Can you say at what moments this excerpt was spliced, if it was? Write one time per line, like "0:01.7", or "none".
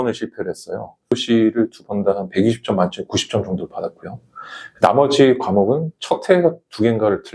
0:01.2